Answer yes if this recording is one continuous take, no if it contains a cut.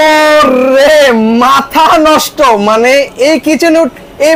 yes